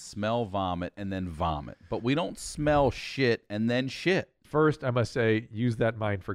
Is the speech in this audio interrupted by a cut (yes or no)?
yes